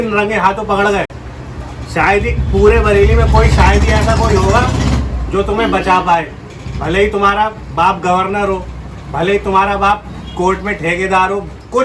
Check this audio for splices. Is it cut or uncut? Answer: uncut